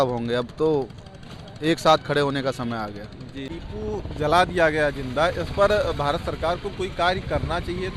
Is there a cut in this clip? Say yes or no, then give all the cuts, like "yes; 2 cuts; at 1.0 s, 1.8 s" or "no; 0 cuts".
yes; 1 cut; at 3.5 s